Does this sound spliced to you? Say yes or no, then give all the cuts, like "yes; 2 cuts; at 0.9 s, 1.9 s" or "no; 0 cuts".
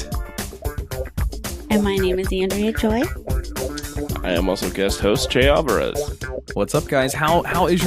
yes; 1 cut; at 6.3 s